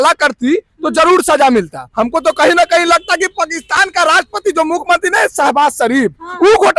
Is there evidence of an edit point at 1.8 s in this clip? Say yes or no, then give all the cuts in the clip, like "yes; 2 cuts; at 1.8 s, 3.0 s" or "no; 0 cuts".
yes; 1 cut; at 1.8 s